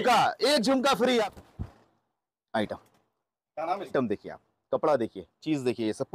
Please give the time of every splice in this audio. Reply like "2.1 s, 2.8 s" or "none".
1.1 s, 3.9 s

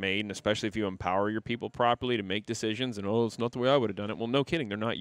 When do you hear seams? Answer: none

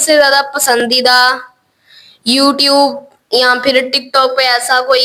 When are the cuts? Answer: none

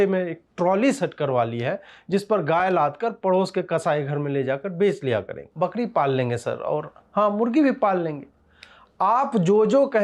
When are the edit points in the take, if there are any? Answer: 5.4 s

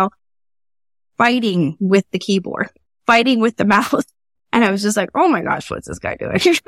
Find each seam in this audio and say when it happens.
none

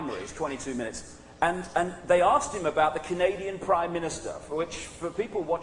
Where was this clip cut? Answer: 2.8 s

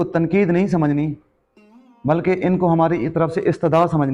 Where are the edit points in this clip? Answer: none

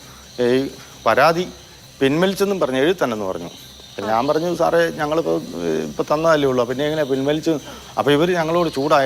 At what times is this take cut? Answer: none

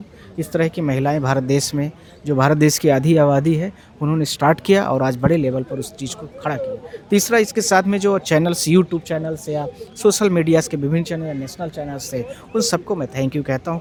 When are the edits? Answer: none

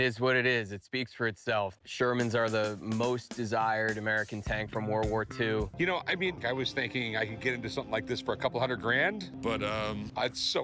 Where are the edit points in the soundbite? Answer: 5.9 s, 9.3 s

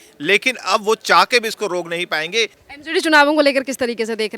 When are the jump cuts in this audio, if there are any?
2.6 s

